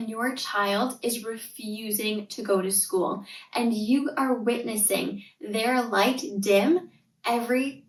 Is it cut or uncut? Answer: uncut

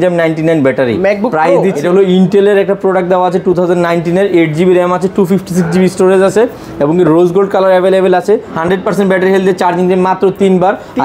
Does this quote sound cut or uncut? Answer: cut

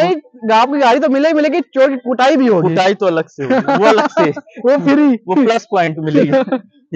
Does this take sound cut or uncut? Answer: uncut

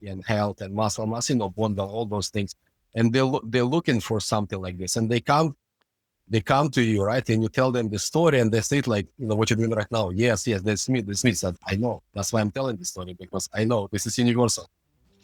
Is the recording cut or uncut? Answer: uncut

